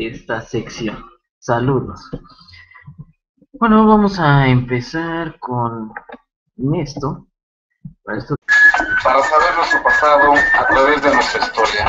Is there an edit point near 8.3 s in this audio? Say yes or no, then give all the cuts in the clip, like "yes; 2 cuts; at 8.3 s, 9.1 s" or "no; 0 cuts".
no; 0 cuts